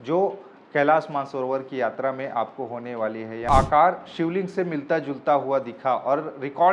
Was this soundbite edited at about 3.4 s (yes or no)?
yes